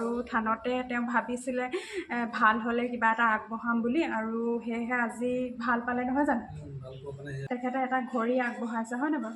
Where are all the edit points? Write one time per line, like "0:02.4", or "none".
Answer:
0:07.4